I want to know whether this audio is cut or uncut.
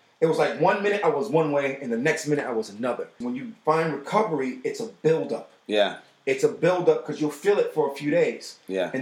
cut